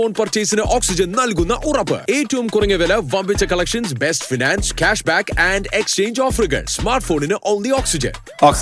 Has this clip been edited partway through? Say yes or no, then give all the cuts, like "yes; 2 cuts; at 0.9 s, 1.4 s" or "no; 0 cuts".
no; 0 cuts